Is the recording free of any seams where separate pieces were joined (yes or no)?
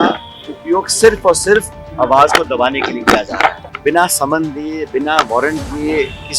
no